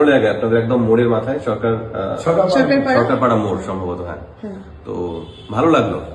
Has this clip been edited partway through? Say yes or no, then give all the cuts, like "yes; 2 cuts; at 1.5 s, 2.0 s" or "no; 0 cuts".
no; 0 cuts